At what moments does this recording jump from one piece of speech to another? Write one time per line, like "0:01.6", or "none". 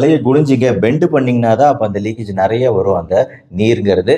none